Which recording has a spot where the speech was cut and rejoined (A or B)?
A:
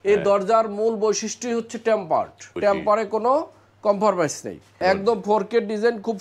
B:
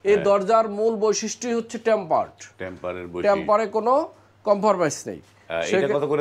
A